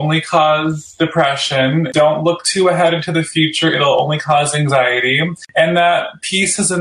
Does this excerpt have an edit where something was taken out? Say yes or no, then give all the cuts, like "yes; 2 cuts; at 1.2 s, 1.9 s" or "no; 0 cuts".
yes; 2 cuts; at 1.9 s, 5.4 s